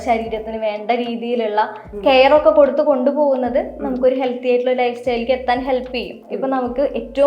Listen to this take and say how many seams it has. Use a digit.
1